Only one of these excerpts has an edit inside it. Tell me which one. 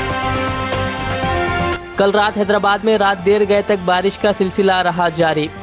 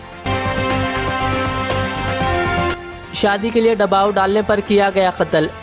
first; 1 cut; at 1.7 s

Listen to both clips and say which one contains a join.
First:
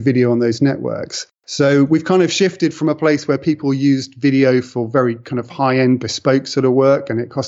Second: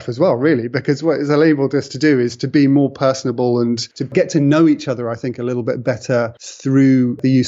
second; 2 cuts; at 4.1 s, 6.4 s

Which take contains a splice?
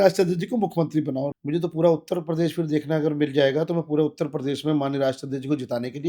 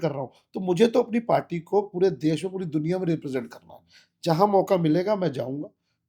first; 1 cut; at 1.3 s

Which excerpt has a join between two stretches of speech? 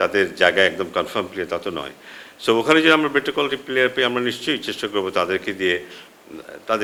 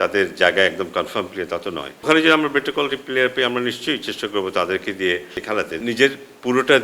second; 2 cuts; at 2.0 s, 5.7 s

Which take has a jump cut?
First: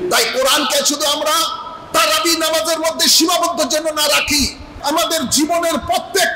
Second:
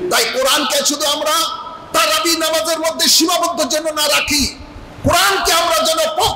first; 1 cut; at 4.7 s

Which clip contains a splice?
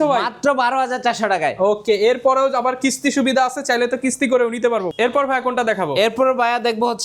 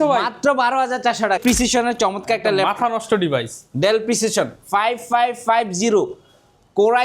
second; 1 cut; at 1.4 s

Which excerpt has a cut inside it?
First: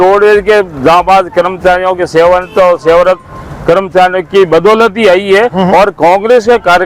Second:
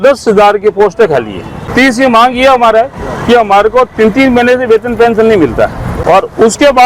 second; 2 cuts; at 1.6 s, 5.9 s

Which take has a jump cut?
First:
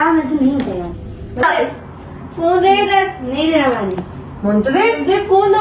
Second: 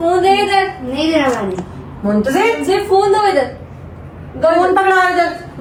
first; 1 cut; at 1.4 s

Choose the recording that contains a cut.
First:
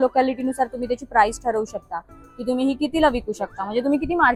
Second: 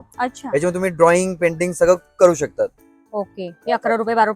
second; 1 cut; at 2.8 s

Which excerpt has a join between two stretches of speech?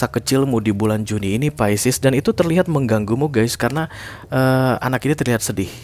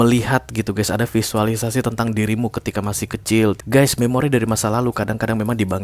second; 1 cut; at 3.6 s

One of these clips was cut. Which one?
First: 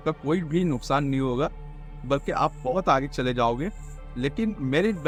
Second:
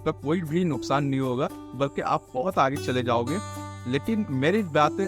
second; 1 cut; at 1.6 s

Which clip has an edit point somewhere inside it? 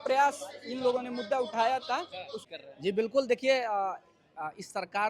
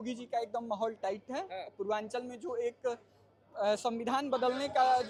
first; 1 cut; at 2.3 s

